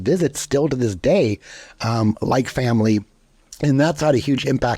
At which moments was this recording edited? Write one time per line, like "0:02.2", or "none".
none